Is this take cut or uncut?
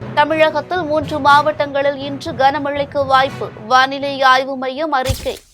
uncut